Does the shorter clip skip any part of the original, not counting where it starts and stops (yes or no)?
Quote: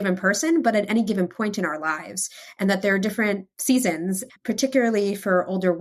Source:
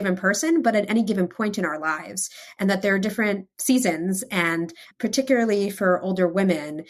yes